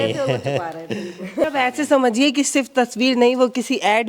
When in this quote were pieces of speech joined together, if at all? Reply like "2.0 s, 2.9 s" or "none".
1.4 s